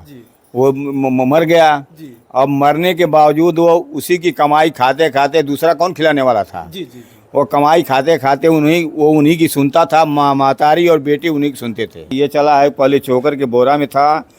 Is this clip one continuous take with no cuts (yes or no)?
no